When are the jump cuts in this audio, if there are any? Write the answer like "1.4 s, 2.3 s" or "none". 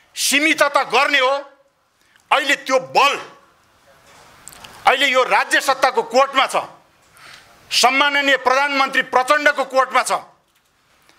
none